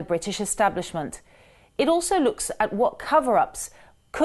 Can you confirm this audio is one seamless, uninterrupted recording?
no; 1 cut; at 2.3 s

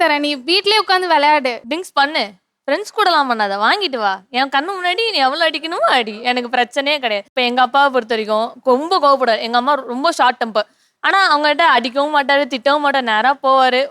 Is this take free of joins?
no; 1 cut; at 1.6 s

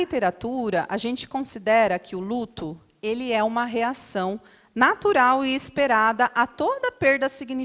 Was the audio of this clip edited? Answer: no; 0 cuts

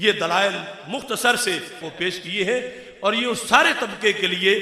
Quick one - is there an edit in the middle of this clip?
yes; 1 cut; at 1.9 s

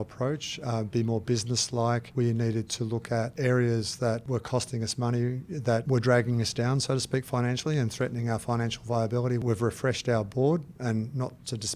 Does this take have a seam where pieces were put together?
yes; 5 cuts; at 2.1 s, 3.3 s, 4.2 s, 5.8 s, 9.4 s

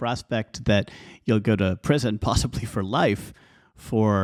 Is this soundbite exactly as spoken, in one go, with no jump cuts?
yes; 0 cuts

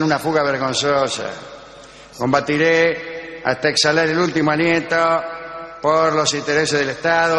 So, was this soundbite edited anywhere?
yes; 1 cut; at 6.2 s

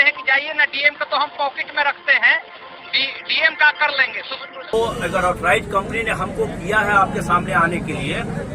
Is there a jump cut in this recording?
yes; 1 cut; at 4.7 s

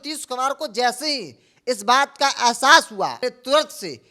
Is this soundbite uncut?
no; 1 cut; at 3.2 s

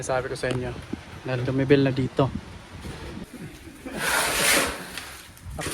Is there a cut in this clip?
yes; 1 cut; at 3.2 s

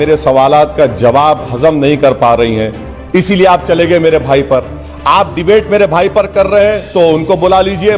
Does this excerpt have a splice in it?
no; 0 cuts

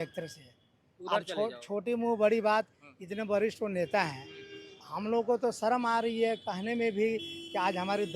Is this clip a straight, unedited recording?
yes; 0 cuts

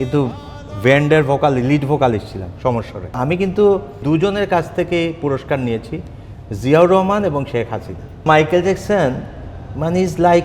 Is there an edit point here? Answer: yes; 3 cuts; at 3.1 s, 4.0 s, 8.3 s

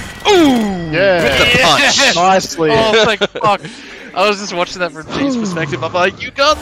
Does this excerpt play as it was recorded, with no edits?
yes; 0 cuts

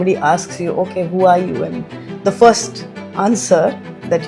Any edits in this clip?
no; 0 cuts

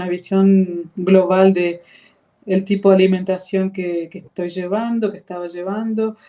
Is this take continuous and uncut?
yes; 0 cuts

